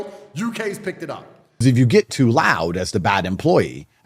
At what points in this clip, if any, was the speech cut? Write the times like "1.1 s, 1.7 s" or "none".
1.4 s